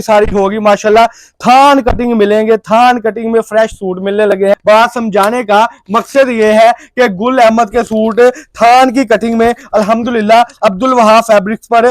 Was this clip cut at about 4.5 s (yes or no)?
yes